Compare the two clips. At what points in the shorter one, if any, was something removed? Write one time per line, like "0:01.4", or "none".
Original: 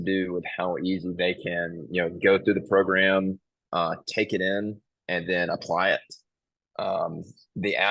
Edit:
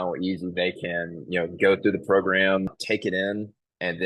0:02.8